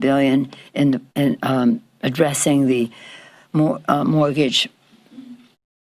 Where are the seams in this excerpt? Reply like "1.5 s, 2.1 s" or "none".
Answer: none